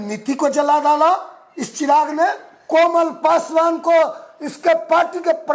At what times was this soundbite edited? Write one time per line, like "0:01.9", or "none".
0:02.5